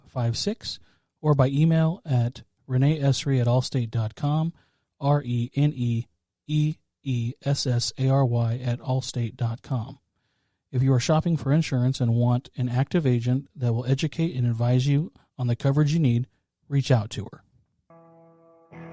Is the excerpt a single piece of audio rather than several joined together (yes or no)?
no